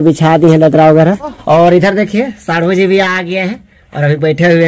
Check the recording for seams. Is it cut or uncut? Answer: cut